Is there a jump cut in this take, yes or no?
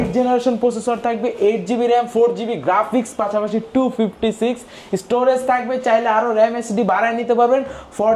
no